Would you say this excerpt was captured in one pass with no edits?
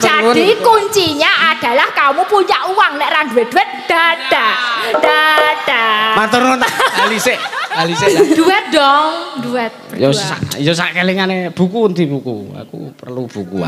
no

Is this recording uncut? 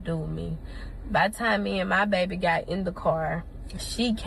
no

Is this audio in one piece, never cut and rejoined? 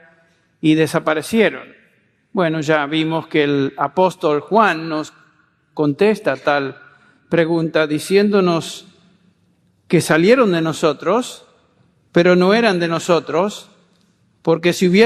no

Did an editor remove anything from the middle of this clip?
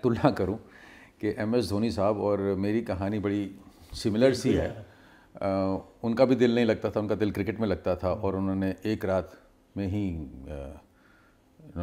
no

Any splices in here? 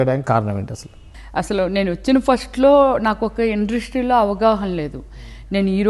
no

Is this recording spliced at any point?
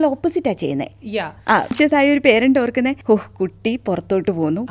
yes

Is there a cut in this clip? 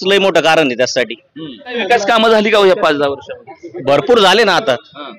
no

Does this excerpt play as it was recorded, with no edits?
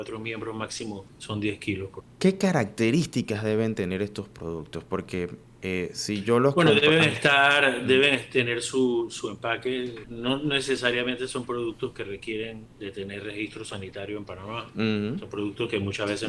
no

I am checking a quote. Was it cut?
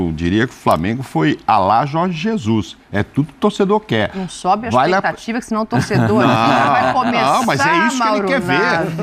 no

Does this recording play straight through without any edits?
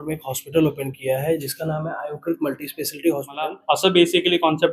no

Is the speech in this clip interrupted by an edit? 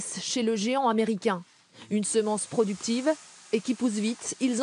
no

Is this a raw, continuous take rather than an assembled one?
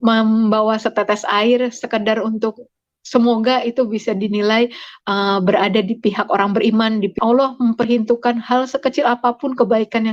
no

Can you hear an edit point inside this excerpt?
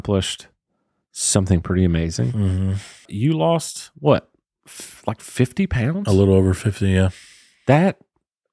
yes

